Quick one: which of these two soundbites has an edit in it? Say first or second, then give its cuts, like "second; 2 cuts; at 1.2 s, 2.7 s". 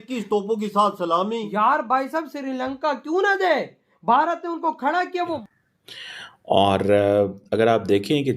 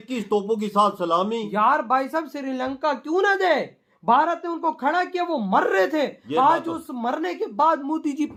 first; 1 cut; at 5.4 s